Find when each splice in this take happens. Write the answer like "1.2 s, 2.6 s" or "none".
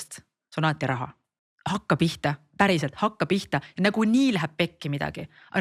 1.2 s